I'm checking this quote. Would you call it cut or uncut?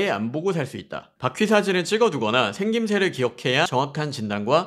cut